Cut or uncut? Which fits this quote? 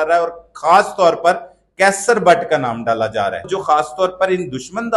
cut